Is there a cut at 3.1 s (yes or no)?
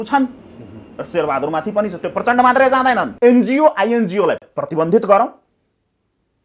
yes